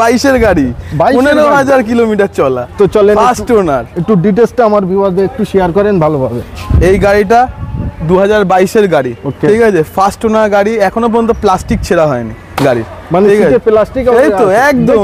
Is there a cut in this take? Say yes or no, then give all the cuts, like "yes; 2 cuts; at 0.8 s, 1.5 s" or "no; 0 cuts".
no; 0 cuts